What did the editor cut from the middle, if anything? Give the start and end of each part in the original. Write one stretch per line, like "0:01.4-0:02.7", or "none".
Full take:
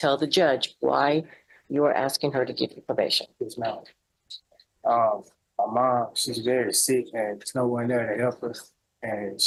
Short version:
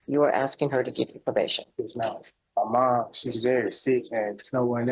0:04.0-0:05.4